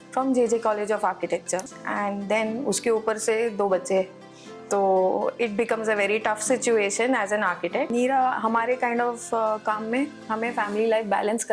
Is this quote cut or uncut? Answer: cut